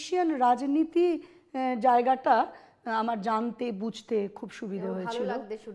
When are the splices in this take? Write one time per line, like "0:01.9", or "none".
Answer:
none